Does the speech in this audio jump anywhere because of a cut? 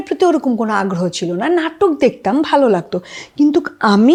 no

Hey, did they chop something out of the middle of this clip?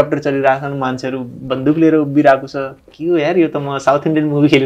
no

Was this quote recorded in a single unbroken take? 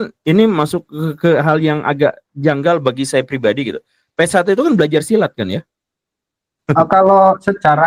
yes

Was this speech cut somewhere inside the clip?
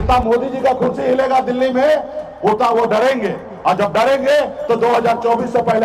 no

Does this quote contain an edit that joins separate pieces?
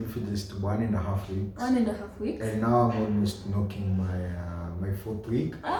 no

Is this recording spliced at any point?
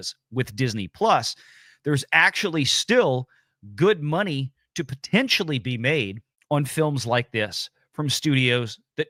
no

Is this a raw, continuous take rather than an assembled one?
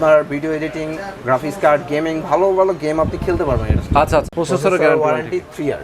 no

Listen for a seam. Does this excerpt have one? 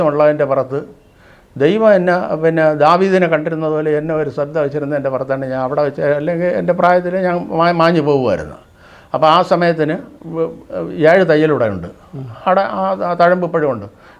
no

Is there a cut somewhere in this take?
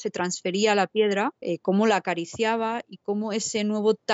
yes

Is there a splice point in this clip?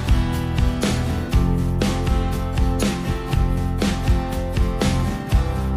no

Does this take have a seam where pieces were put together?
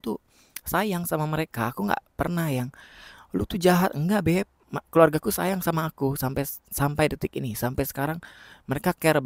no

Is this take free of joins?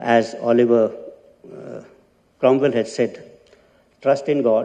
yes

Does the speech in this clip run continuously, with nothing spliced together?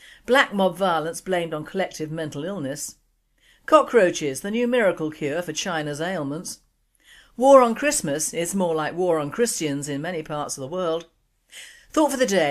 yes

